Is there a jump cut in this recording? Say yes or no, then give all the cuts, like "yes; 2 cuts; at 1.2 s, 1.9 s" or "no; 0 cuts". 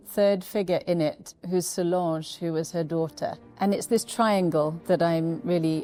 no; 0 cuts